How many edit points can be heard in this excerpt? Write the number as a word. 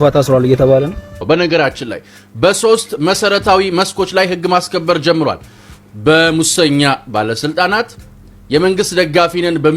one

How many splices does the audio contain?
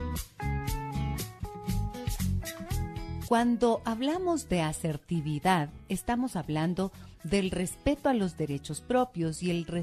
zero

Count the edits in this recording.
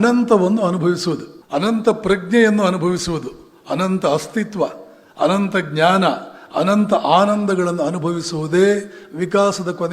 one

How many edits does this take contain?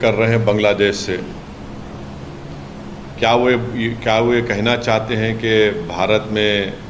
zero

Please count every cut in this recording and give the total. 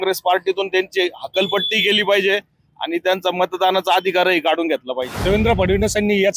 one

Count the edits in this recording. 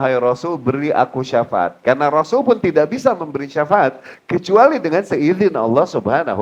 zero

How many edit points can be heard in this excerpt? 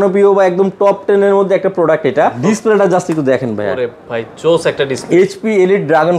one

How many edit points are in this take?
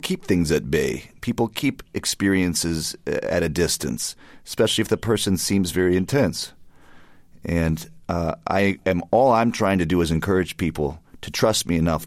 zero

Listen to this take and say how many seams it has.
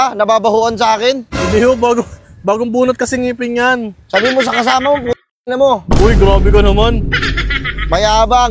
zero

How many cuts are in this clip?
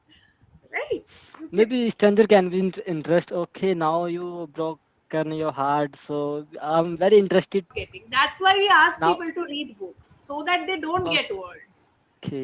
one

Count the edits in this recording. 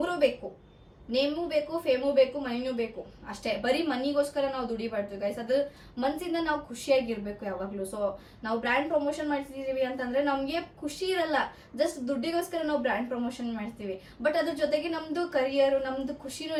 zero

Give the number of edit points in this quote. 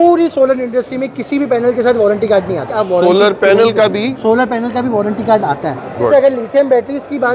two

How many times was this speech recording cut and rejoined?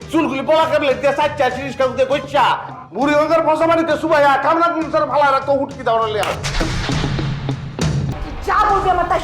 one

